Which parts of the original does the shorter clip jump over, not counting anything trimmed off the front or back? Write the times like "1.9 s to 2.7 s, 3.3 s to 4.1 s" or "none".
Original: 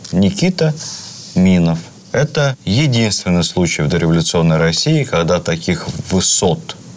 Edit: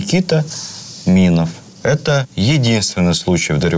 none